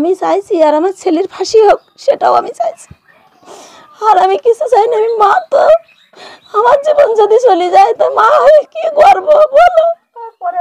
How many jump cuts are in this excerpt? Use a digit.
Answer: 0